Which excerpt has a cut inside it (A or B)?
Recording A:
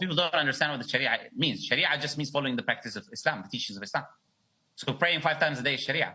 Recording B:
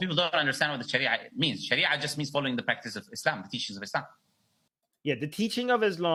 A